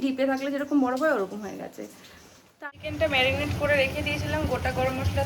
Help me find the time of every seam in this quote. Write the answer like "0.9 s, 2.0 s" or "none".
2.5 s